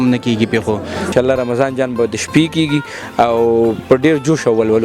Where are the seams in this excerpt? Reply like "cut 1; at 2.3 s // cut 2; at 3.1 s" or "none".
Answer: cut 1; at 1.1 s